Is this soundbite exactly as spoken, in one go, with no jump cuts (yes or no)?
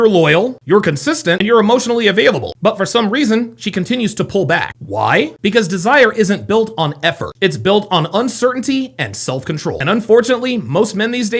yes